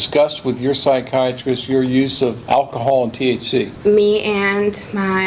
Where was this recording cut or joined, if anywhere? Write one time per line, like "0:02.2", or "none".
0:02.4
0:03.7